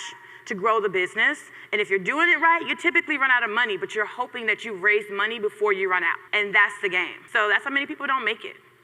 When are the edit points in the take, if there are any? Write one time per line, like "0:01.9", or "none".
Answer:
0:06.2
0:07.2